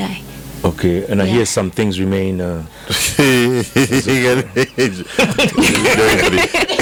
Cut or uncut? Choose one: uncut